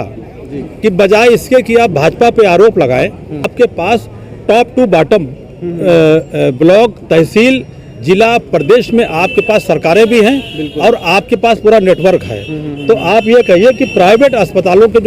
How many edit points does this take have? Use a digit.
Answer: 1